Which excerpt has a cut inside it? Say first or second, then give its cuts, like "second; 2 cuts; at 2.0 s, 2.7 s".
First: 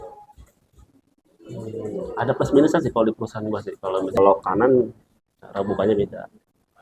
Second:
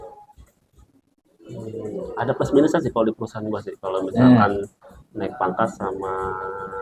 first; 1 cut; at 4.1 s